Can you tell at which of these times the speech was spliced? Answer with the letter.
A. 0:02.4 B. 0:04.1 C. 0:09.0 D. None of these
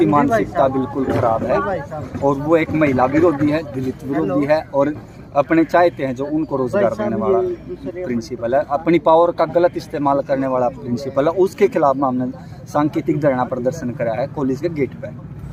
D